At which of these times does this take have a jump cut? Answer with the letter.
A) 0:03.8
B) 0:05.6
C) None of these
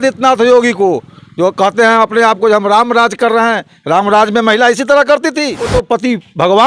B